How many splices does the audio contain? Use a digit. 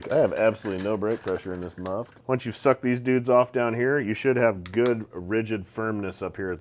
1